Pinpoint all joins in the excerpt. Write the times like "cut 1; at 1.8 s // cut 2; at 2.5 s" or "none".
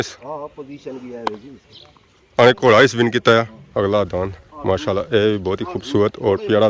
cut 1; at 3.6 s

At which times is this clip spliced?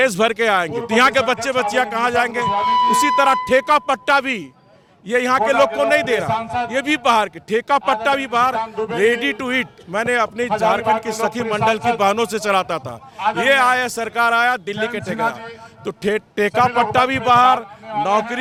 none

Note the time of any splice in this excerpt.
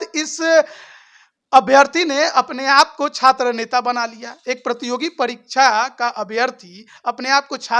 none

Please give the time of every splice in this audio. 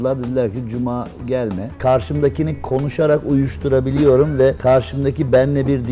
cut 1; at 1.8 s // cut 2; at 4.6 s

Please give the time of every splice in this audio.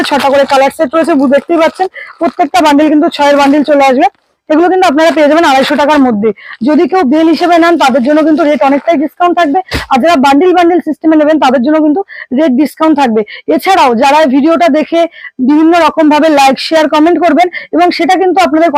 none

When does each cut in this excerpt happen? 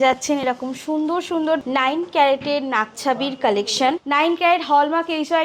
cut 1; at 1.6 s // cut 2; at 4.0 s

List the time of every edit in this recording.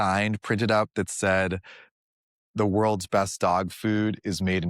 none

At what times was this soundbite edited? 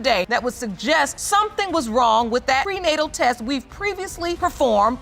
none

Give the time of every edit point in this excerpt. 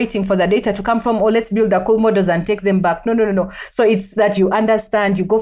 cut 1; at 4.4 s

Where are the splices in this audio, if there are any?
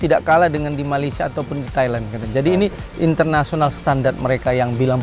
none

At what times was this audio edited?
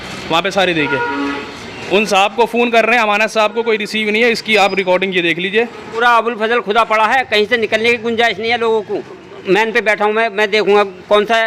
cut 1; at 5.8 s // cut 2; at 9.1 s

